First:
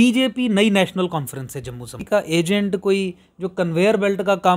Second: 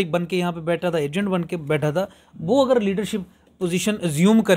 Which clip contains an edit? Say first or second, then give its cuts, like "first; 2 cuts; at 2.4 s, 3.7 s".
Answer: first; 1 cut; at 1.9 s